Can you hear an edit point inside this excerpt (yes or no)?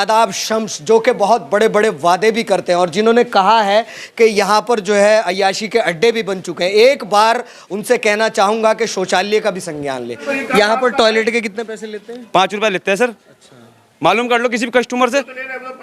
yes